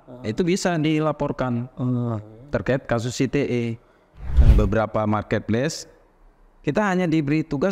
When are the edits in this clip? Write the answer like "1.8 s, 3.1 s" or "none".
4.4 s